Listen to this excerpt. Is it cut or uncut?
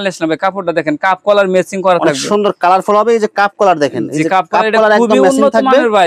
uncut